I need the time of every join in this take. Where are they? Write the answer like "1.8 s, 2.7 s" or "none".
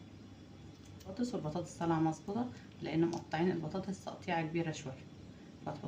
1.1 s